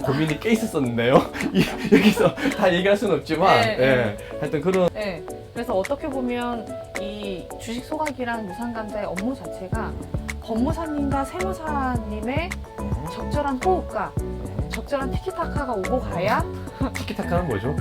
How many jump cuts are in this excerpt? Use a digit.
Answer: 1